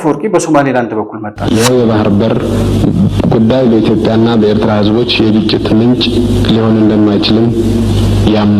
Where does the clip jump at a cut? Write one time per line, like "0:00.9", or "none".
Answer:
0:01.4